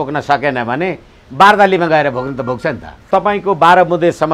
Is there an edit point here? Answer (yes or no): yes